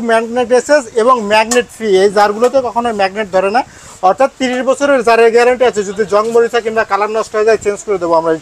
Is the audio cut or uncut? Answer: uncut